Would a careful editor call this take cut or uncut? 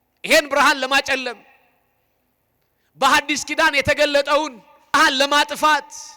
cut